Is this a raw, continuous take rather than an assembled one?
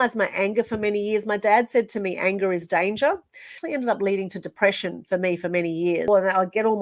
no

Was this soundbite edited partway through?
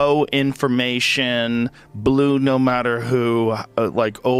no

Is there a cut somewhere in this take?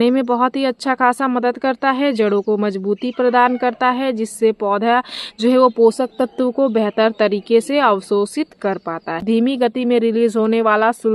yes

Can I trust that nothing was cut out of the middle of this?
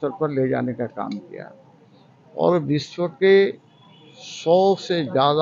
yes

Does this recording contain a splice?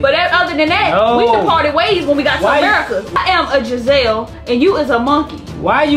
yes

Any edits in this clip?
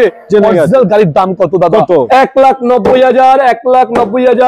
yes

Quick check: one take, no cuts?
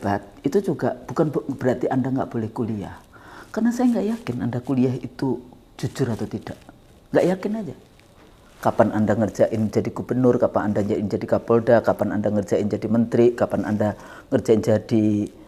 yes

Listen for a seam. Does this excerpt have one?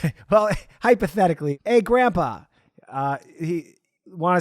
yes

